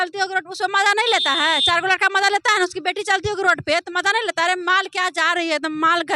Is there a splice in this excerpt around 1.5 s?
no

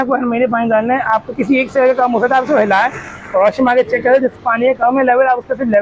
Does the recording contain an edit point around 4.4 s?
no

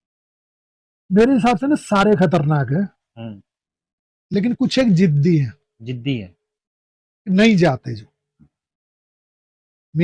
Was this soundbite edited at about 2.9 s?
no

